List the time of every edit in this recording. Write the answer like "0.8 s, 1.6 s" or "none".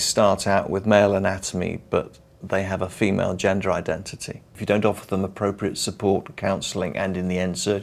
4.5 s